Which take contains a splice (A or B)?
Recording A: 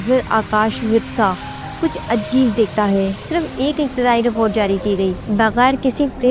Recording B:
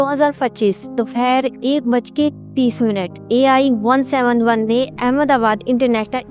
A